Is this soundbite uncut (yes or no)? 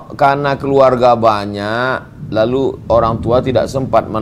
yes